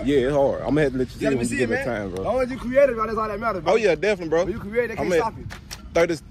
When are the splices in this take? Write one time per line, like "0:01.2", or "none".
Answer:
none